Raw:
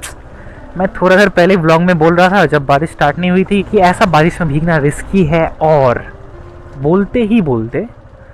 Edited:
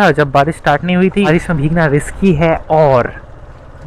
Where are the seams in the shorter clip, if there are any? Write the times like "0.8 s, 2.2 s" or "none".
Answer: 1.3 s